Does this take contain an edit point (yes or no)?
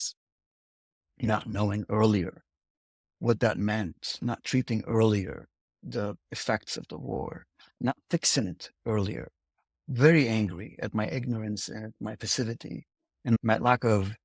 yes